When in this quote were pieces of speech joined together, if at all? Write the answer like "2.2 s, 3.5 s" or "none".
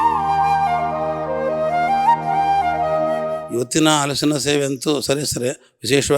3.4 s